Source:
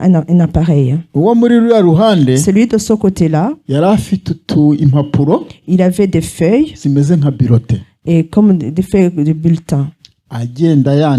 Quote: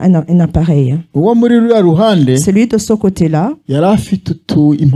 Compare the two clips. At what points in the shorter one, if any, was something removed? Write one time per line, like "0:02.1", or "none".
none